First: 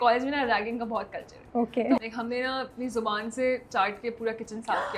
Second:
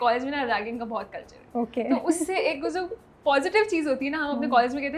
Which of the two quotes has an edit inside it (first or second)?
first